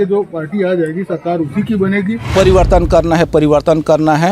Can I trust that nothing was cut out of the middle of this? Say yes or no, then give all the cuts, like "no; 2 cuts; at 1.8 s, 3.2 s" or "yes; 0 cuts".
no; 1 cut; at 2.3 s